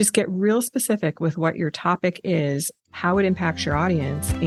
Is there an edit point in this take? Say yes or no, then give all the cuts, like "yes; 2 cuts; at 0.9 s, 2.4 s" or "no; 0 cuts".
no; 0 cuts